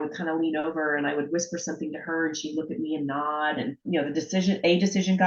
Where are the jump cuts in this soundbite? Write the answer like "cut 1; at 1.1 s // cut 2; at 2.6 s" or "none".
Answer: cut 1; at 3.8 s